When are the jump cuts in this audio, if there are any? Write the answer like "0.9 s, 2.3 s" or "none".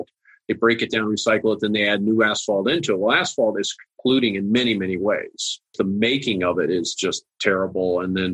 5.7 s